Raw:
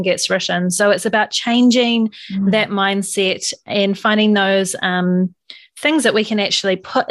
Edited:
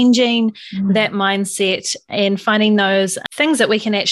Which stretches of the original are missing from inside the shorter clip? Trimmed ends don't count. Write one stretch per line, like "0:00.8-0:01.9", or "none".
0:04.8-0:05.7